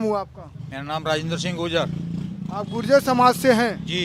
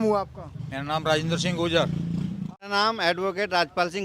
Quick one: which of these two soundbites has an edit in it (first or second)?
second